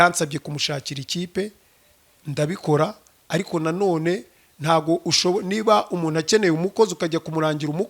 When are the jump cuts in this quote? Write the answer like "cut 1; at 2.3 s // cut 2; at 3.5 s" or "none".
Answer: none